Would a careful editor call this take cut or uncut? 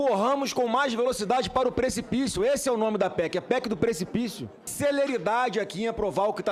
uncut